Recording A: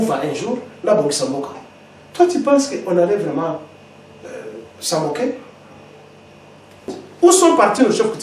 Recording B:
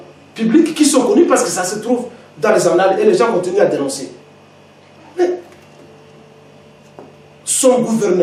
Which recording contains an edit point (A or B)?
A